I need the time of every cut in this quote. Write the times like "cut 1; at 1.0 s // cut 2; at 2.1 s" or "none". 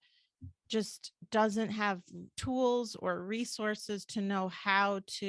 none